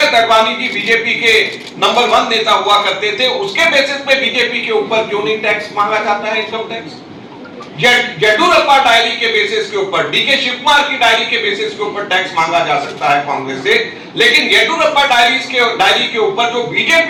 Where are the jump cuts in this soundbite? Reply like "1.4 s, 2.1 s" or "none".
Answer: none